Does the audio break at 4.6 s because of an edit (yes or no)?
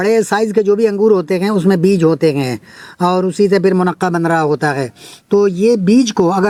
no